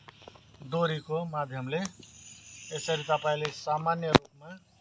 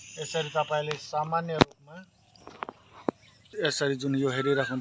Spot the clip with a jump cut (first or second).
second